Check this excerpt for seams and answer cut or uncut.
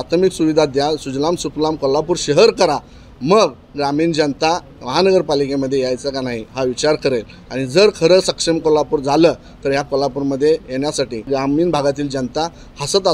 uncut